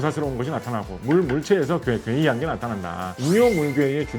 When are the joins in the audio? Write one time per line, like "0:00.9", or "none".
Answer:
0:03.0